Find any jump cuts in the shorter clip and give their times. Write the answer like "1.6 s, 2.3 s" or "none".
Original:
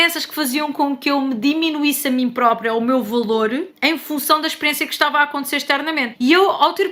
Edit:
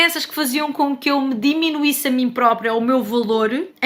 none